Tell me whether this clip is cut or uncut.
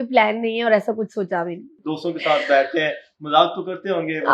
uncut